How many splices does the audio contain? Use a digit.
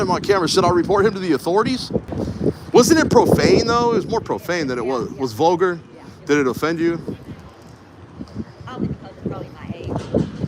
1